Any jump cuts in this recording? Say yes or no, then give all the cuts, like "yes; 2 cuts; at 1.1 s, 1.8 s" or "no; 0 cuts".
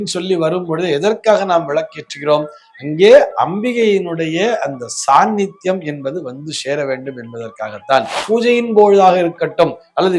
yes; 1 cut; at 8.2 s